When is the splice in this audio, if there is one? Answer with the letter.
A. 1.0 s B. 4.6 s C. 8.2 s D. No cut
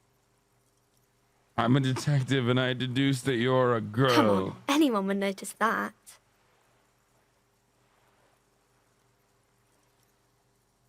D